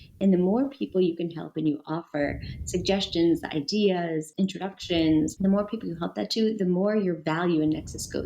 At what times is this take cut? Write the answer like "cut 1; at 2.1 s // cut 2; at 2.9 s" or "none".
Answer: cut 1; at 4.3 s // cut 2; at 5.3 s